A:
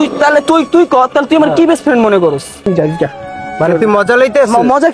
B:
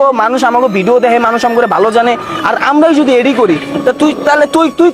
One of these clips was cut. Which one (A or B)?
A